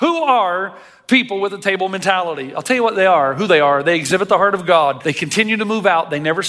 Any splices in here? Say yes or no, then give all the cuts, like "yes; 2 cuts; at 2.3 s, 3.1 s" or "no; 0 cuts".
yes; 1 cut; at 5.1 s